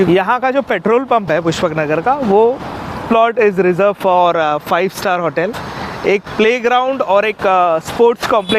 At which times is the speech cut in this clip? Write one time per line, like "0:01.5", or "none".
0:03.0
0:05.6